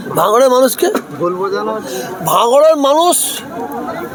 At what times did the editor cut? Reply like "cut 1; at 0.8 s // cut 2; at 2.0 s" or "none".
none